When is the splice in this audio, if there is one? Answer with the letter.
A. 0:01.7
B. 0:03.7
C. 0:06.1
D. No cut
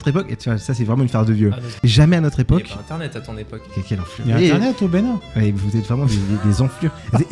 A